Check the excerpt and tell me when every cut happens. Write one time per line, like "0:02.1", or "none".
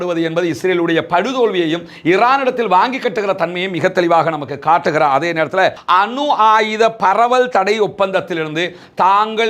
0:05.8